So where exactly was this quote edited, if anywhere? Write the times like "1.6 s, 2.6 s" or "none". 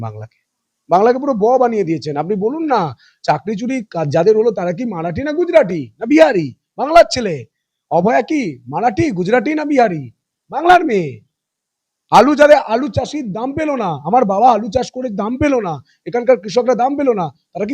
none